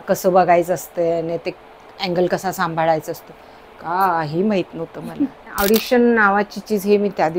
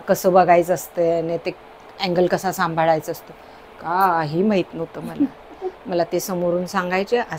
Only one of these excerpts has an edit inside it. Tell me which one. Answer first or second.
first